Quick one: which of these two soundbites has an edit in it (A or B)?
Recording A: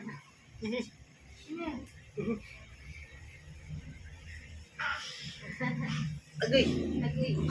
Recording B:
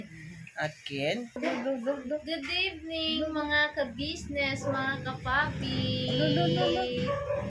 B